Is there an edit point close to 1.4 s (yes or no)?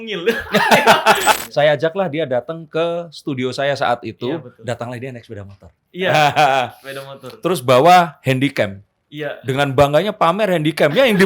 yes